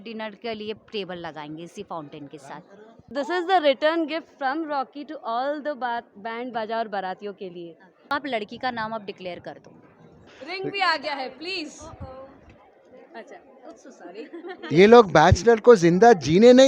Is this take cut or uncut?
cut